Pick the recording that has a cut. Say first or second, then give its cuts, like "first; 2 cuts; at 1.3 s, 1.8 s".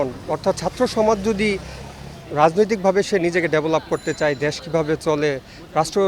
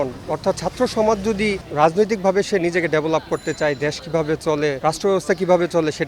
second; 2 cuts; at 1.6 s, 4.8 s